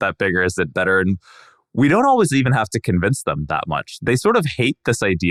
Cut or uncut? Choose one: uncut